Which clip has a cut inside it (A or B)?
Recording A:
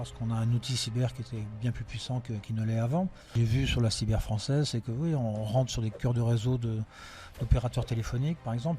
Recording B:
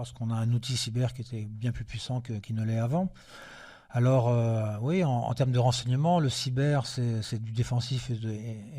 A